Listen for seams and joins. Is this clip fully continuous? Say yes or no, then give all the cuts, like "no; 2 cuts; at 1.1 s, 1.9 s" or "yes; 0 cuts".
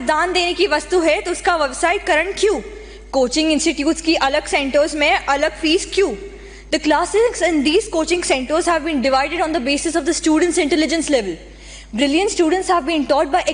yes; 0 cuts